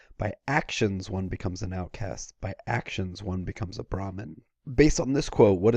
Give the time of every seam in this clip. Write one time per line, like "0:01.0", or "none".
0:01.0